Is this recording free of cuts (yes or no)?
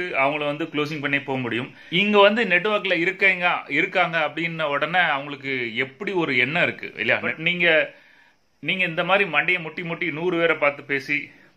no